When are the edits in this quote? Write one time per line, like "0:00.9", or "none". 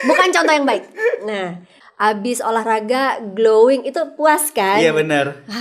0:01.7